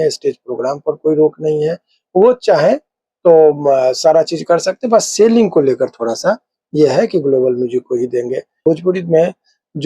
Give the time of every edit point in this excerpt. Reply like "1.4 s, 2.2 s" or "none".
8.6 s